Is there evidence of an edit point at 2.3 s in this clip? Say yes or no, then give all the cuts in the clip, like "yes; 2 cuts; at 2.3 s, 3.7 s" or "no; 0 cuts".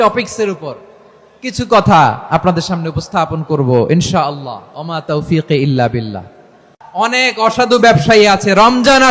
no; 1 cut; at 6.7 s